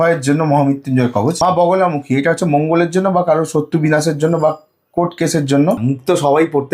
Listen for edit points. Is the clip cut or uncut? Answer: cut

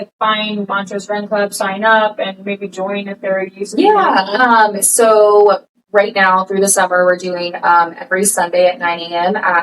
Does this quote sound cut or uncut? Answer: uncut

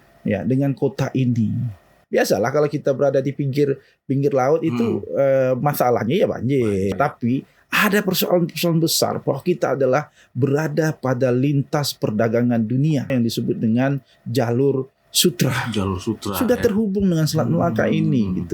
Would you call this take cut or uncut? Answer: cut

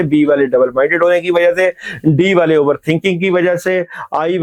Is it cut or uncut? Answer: uncut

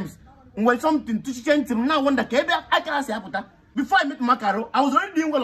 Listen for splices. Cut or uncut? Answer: cut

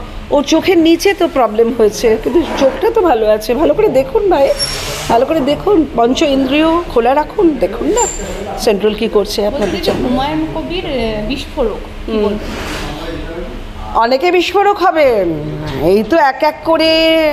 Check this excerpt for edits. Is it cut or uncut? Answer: uncut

